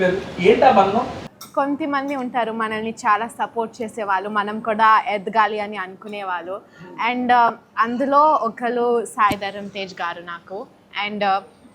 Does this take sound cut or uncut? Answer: cut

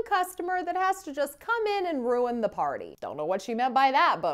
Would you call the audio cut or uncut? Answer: cut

